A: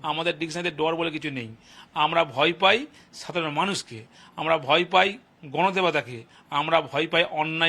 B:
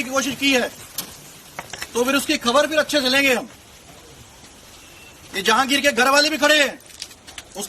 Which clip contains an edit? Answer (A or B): B